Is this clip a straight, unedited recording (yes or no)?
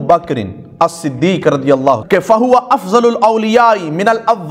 no